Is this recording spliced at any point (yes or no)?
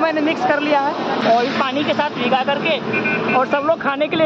yes